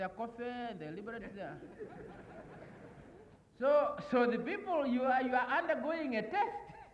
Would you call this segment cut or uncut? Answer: cut